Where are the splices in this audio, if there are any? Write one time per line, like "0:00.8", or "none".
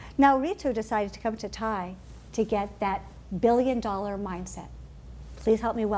0:01.2